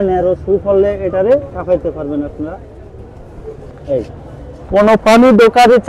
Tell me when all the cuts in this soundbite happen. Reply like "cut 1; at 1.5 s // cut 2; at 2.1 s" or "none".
cut 1; at 4.5 s